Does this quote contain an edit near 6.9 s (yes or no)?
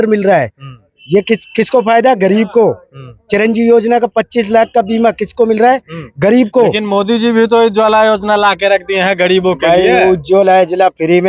no